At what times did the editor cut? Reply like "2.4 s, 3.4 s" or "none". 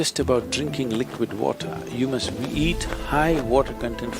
none